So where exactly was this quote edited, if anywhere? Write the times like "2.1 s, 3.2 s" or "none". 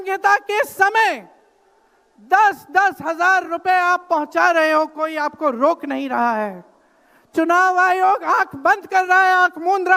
none